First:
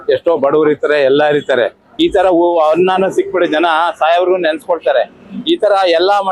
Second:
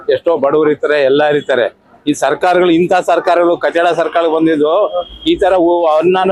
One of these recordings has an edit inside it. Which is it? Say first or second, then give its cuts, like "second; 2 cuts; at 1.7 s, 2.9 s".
first; 1 cut; at 1.8 s